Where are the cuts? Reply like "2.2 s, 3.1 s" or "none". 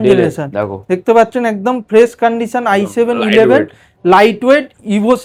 none